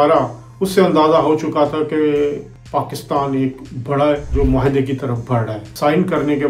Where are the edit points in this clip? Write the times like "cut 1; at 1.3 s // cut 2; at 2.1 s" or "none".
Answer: cut 1; at 2.5 s // cut 2; at 4.3 s // cut 3; at 5.6 s